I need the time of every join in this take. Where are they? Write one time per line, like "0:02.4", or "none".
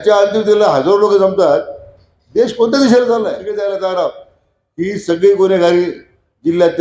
0:03.5